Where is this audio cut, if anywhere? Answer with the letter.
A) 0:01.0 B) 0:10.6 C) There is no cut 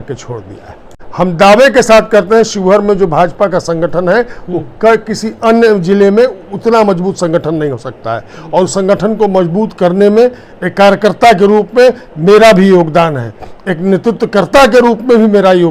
A